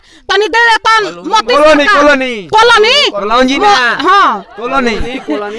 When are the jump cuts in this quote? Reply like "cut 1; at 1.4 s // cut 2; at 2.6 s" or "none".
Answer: none